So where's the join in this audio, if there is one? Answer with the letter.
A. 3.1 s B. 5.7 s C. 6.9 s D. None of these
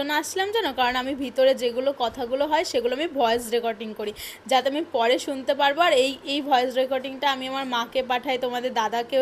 D